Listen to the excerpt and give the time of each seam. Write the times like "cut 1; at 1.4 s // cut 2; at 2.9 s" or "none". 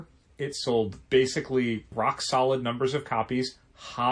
cut 1; at 1.0 s // cut 2; at 1.9 s